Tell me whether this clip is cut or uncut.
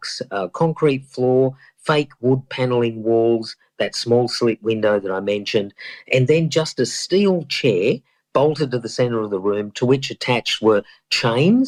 uncut